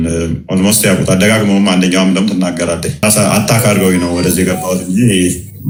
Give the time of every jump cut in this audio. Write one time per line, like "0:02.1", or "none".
none